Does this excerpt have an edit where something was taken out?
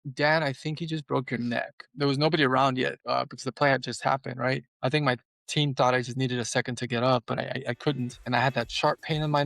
yes; 4 cuts; at 1.9 s, 3.0 s, 4.7 s, 8.2 s

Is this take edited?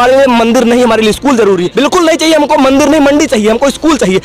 yes; 1 cut; at 1.7 s

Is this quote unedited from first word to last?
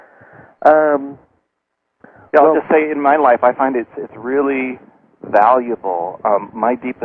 yes; 0 cuts

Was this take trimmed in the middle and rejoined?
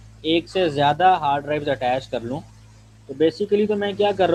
no; 0 cuts

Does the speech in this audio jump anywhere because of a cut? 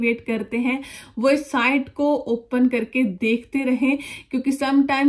no; 0 cuts

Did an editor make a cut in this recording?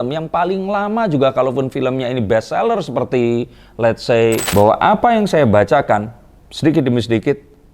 yes; 1 cut; at 4.4 s

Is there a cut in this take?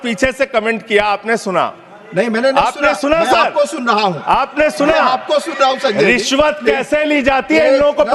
no; 0 cuts

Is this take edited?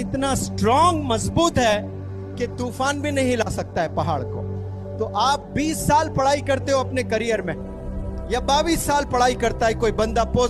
no; 0 cuts

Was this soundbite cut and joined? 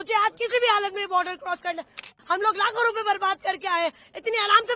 yes; 1 cut; at 2.1 s

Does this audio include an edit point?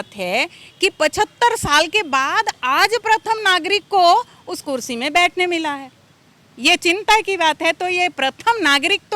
no; 0 cuts

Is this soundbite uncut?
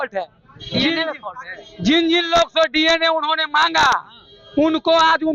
yes; 0 cuts

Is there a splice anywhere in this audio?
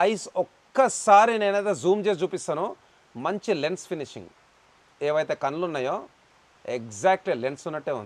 no; 0 cuts

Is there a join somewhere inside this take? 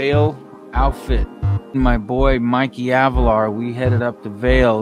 yes; 1 cut; at 1.7 s

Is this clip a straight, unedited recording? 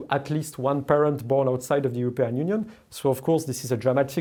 yes; 0 cuts

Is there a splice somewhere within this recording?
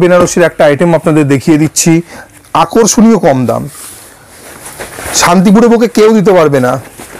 no; 0 cuts

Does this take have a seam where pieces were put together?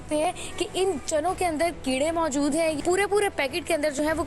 yes; 1 cut; at 2.8 s

